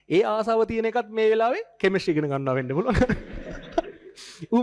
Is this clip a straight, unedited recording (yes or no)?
yes